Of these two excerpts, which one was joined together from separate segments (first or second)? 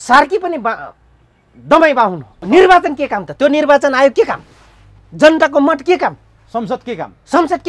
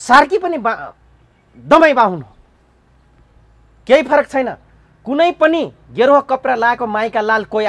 first